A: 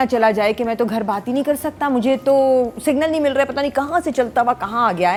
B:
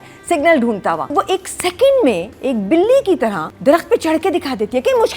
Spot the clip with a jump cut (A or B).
B